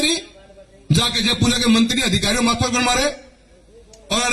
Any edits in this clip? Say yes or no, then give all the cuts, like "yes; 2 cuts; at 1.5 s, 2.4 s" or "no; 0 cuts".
no; 0 cuts